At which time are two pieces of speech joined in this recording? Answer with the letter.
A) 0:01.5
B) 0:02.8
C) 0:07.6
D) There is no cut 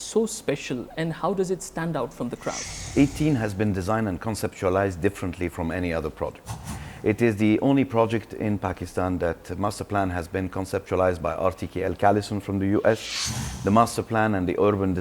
B